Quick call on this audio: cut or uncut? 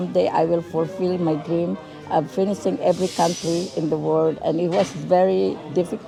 uncut